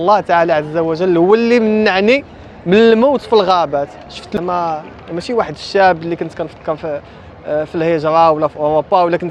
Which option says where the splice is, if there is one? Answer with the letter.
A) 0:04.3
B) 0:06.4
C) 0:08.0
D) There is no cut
A